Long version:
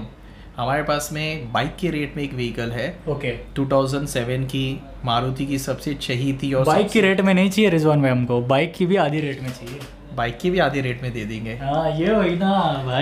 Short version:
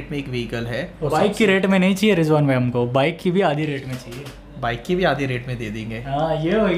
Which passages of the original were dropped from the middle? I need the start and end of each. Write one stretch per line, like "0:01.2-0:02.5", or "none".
0:03.1-0:06.6